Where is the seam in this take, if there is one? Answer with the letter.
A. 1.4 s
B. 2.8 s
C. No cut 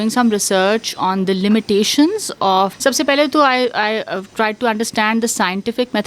B